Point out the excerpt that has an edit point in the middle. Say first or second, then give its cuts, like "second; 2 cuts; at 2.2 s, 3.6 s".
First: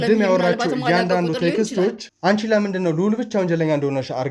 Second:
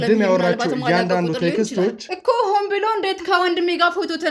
first; 1 cut; at 2.1 s